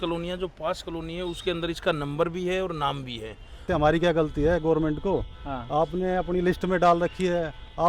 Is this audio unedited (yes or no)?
no